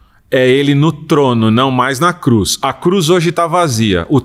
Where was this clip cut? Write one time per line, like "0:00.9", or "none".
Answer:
none